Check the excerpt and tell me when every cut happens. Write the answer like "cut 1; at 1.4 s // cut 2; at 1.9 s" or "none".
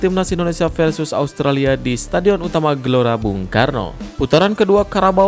cut 1; at 4.0 s